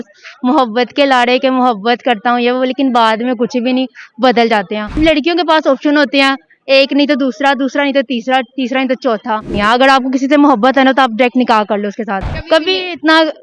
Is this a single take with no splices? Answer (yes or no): no